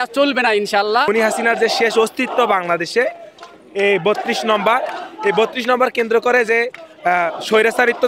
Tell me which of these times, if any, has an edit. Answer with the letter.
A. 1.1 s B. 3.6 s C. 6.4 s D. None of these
A